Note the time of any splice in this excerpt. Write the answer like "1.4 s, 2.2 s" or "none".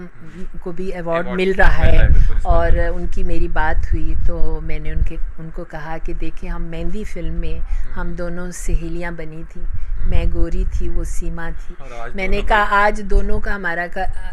none